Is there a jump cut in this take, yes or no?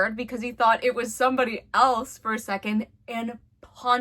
no